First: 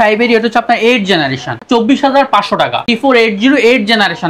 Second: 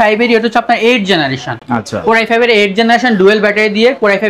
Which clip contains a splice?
first; 2 cuts; at 1.6 s, 2.8 s

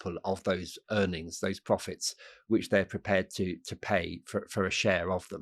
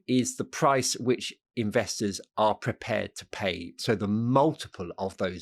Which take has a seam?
second; 1 cut; at 3.7 s

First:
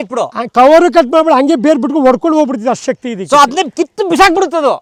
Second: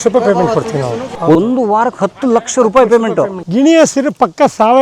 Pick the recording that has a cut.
second; 2 cuts; at 1.1 s, 3.4 s

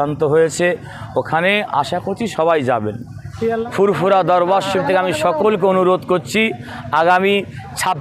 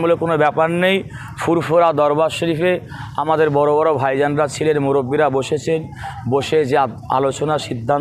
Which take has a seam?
first; 1 cut; at 3.7 s

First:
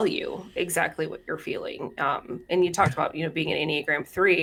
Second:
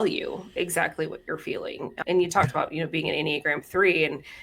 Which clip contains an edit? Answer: second; 1 cut; at 2.0 s

